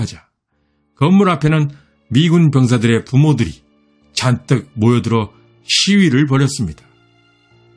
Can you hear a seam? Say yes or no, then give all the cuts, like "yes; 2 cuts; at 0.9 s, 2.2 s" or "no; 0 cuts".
no; 0 cuts